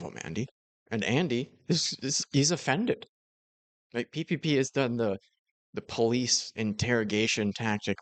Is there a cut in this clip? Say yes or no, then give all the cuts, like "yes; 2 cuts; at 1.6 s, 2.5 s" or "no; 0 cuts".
yes; 1 cut; at 3.8 s